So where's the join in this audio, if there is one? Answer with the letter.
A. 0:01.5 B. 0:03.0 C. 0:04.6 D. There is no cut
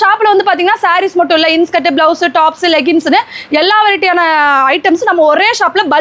D